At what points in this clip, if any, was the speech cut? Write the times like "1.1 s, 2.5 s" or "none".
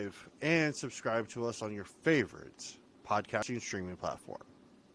3.4 s

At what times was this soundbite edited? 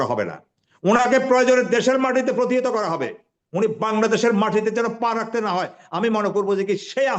none

